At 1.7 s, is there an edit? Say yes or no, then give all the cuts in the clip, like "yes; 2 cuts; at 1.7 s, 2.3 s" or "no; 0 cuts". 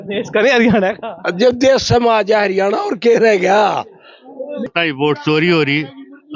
no; 1 cut; at 4.7 s